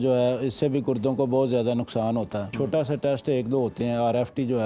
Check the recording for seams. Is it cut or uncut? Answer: cut